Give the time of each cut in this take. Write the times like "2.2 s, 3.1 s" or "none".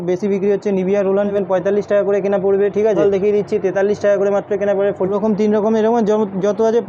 1.3 s, 3.0 s, 5.1 s